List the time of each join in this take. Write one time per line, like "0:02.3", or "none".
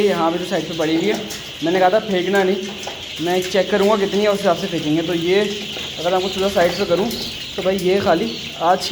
none